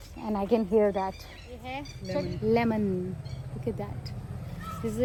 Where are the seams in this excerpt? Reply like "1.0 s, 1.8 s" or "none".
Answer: none